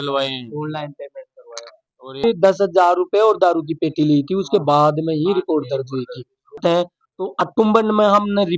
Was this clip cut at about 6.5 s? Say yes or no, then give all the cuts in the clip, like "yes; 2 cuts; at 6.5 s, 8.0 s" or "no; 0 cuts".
yes; 2 cuts; at 2.2 s, 6.5 s